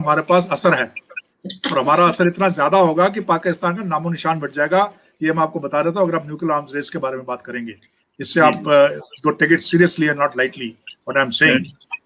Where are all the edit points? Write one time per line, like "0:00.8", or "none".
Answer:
none